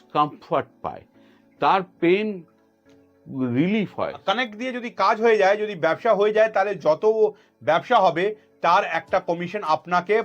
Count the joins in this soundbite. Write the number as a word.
one